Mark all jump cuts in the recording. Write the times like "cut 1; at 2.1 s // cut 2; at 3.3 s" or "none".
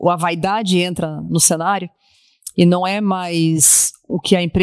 none